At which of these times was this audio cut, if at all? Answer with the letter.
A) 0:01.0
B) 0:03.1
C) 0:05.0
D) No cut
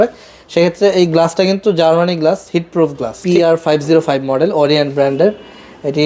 B